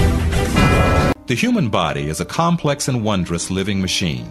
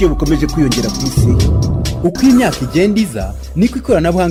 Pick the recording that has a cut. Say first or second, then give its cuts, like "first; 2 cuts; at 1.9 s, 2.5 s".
first; 1 cut; at 1.2 s